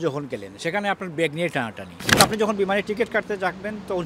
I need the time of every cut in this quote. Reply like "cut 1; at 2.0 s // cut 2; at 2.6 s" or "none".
cut 1; at 2.2 s